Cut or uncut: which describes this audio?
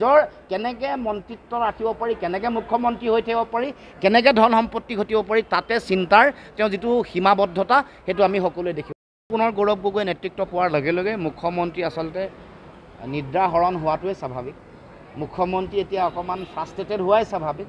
cut